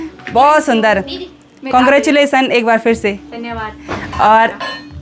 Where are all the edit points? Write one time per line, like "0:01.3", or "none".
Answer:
none